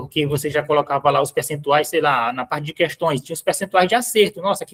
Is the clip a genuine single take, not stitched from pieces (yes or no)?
yes